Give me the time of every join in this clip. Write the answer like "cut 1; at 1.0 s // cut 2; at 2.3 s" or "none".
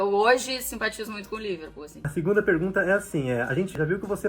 cut 1; at 2.0 s